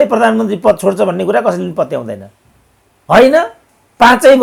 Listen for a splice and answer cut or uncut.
uncut